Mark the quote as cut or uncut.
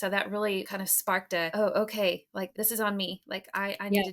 cut